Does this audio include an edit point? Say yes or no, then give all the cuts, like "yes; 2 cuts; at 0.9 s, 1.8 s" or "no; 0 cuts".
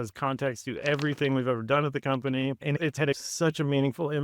yes; 1 cut; at 3.3 s